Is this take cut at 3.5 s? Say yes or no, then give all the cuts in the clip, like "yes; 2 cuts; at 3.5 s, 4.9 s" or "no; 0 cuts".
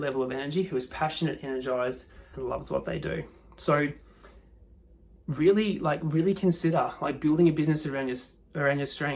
no; 0 cuts